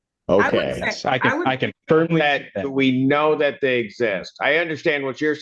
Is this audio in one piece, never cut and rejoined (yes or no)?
yes